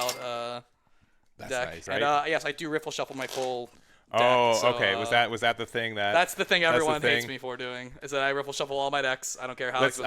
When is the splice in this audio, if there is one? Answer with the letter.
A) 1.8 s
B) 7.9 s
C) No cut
A